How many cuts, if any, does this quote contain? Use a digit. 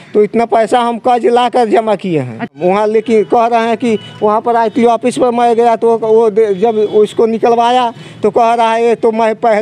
1